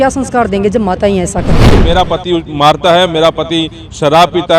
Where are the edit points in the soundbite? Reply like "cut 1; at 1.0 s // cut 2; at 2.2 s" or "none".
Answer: cut 1; at 1.7 s